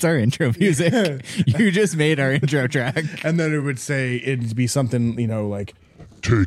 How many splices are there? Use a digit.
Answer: 0